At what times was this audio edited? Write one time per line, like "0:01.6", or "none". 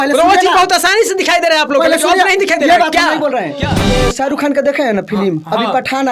0:03.8